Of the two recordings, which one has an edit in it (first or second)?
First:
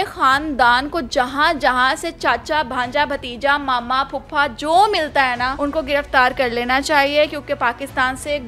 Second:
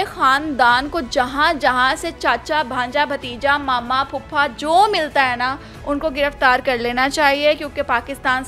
first